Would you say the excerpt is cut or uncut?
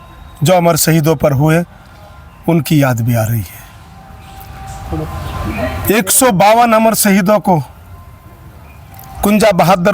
uncut